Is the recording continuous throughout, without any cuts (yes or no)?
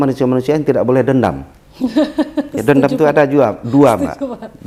yes